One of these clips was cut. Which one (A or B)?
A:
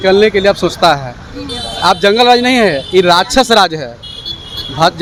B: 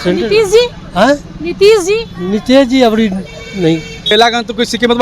B